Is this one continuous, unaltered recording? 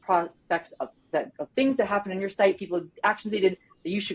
yes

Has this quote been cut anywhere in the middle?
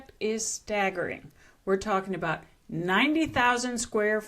no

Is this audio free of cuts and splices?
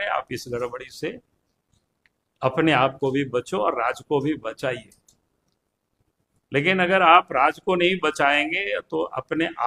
yes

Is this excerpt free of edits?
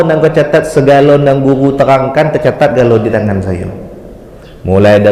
yes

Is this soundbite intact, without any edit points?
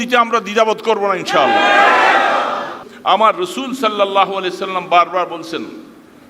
no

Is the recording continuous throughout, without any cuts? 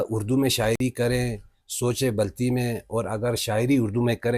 yes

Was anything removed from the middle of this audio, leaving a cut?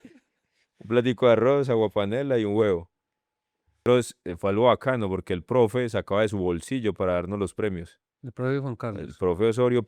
yes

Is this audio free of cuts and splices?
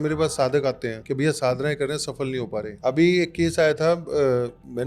no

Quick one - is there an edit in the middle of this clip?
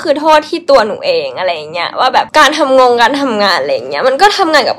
yes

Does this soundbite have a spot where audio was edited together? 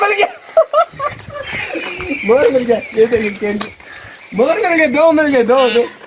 no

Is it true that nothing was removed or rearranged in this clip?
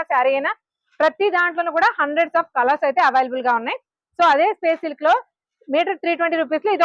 yes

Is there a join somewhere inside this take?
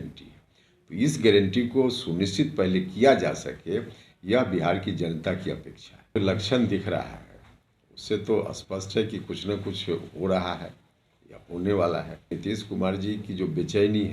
yes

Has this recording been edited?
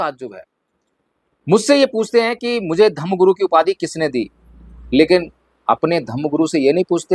no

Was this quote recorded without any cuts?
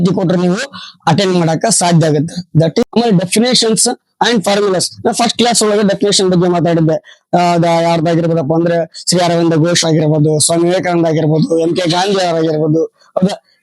no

